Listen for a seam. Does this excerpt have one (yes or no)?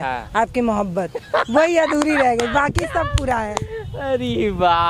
no